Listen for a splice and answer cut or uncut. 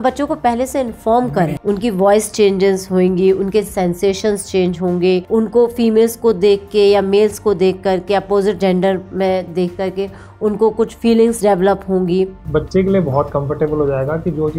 cut